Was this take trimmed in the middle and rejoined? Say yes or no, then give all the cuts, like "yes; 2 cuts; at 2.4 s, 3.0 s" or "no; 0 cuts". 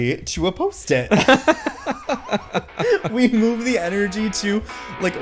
no; 0 cuts